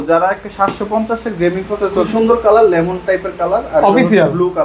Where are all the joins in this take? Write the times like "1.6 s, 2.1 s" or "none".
2.1 s